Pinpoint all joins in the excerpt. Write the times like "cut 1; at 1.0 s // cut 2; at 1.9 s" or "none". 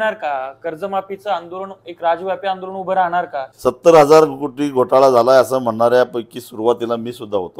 cut 1; at 3.5 s